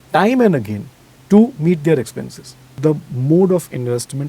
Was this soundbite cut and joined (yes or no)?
yes